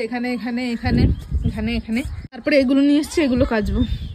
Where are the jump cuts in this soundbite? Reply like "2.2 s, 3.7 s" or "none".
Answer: 2.4 s